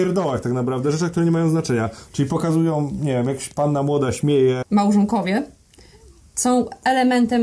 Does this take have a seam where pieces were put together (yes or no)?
yes